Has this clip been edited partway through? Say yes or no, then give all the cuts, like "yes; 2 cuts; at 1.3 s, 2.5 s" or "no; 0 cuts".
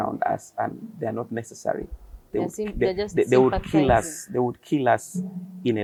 no; 0 cuts